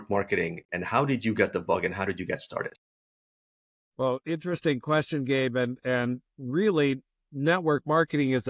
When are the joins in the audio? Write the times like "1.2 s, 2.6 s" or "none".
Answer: none